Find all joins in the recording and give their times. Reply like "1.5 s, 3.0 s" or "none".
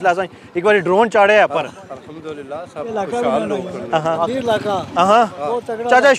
4.2 s

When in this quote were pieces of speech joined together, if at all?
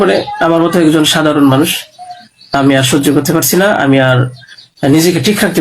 none

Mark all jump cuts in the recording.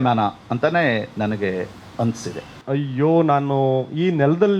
2.6 s

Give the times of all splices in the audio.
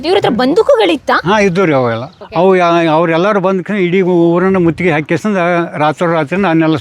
2.1 s

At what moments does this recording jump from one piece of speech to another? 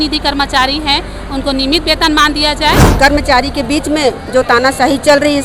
2.9 s

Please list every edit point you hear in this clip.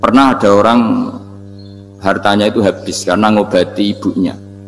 none

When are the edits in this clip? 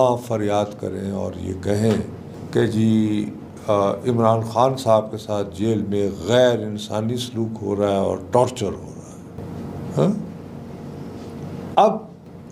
none

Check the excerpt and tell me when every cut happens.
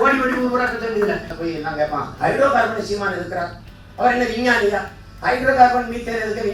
1.3 s

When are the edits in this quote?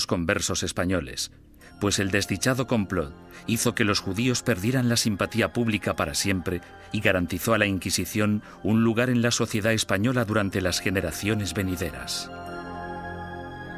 none

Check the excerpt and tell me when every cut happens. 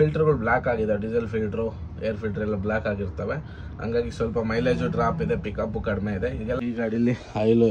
6.6 s

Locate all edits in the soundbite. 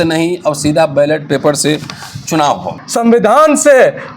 2.7 s

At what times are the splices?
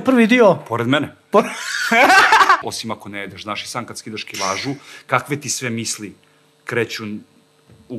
2.6 s

